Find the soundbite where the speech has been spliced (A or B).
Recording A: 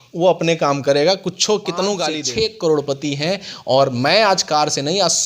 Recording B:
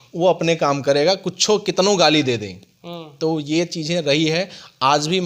A